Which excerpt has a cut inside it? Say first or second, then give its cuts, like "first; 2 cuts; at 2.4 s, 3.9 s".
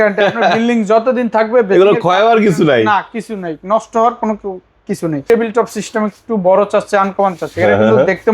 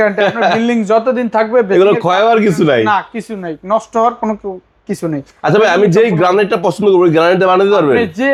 first; 1 cut; at 5.2 s